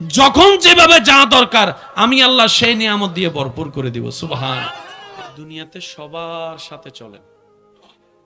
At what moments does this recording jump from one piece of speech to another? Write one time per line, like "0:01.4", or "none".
none